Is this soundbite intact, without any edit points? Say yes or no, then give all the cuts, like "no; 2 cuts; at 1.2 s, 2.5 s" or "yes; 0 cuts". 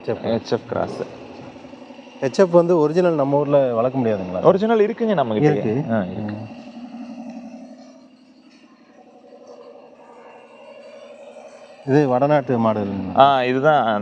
yes; 0 cuts